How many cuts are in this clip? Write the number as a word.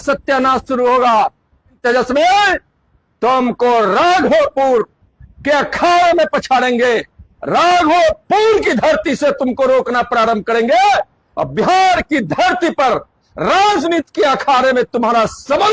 one